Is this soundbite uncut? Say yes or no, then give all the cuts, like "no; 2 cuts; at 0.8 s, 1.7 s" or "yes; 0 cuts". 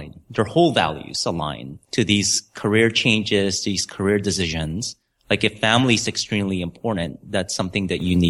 yes; 0 cuts